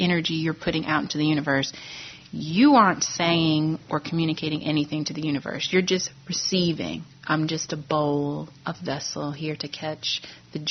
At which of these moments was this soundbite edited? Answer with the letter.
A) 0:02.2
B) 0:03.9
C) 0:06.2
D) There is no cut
D